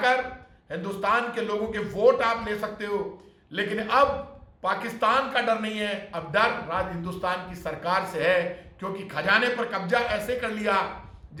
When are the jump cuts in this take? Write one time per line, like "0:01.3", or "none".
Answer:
none